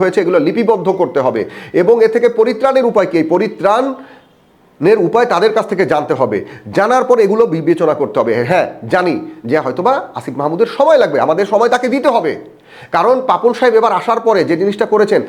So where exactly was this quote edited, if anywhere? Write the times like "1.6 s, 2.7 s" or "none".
none

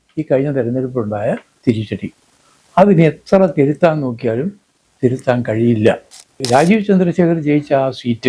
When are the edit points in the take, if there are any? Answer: 6.4 s

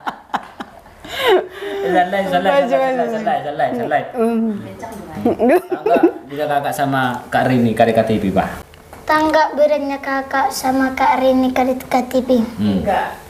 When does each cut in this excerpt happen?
none

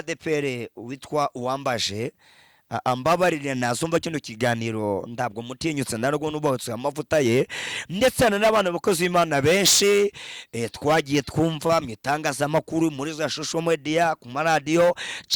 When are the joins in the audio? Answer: none

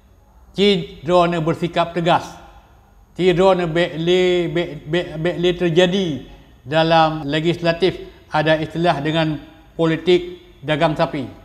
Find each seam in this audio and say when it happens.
7.2 s

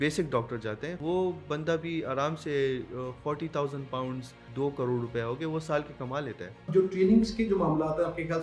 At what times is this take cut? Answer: 1.0 s, 4.4 s, 6.7 s

